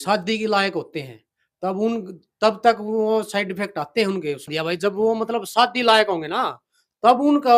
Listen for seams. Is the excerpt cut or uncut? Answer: cut